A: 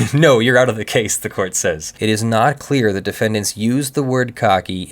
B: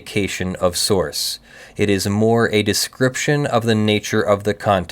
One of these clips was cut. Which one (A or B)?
A